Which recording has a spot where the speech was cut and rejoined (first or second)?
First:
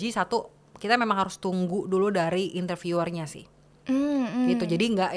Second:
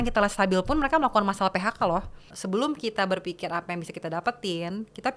second